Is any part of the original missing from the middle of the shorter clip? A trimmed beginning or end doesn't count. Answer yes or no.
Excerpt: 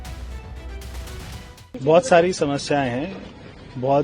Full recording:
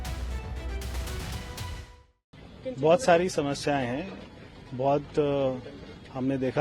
yes